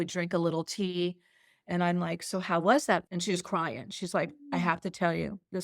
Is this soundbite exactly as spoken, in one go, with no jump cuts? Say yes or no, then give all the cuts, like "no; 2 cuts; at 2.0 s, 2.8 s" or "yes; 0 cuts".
no; 1 cut; at 3.1 s